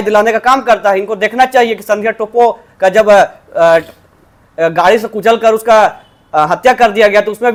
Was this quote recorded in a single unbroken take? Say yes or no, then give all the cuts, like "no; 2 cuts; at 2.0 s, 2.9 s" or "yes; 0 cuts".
yes; 0 cuts